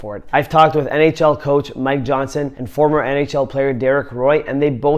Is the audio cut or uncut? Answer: uncut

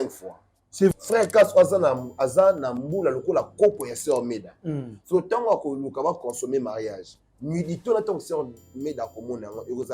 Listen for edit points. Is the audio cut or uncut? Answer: cut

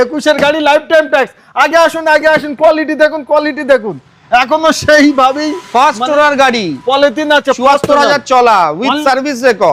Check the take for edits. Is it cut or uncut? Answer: uncut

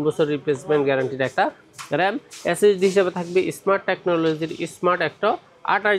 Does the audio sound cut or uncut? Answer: uncut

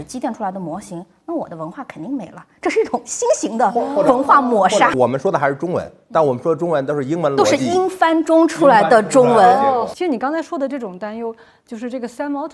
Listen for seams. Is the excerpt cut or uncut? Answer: uncut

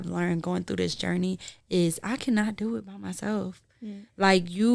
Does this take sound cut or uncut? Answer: uncut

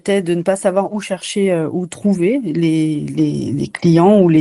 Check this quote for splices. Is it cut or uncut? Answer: uncut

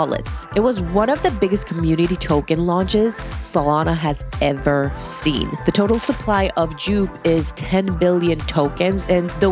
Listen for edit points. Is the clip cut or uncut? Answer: uncut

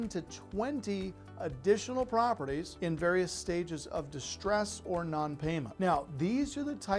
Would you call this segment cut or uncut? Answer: cut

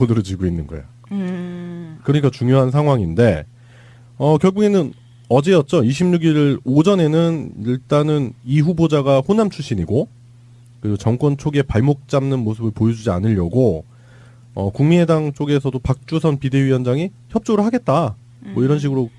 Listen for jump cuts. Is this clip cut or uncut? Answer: cut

